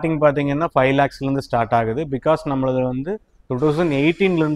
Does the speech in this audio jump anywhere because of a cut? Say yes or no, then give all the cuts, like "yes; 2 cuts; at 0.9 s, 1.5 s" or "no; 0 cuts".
no; 0 cuts